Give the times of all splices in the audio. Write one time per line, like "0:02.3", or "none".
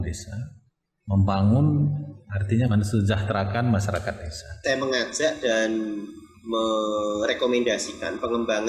0:02.7
0:04.6